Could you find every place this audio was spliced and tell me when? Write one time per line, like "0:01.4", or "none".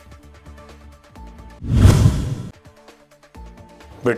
0:01.3